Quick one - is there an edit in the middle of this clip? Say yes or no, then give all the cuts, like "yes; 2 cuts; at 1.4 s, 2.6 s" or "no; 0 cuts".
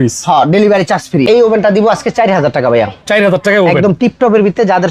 yes; 1 cut; at 1.3 s